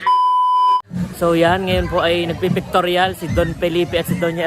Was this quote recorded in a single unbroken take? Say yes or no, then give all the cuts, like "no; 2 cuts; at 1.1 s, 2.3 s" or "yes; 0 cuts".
no; 1 cut; at 0.9 s